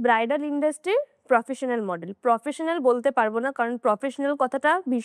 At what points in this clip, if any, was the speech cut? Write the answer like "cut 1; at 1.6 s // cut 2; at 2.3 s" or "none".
none